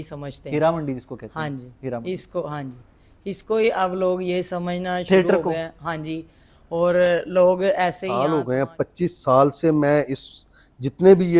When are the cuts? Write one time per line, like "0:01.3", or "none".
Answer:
0:08.0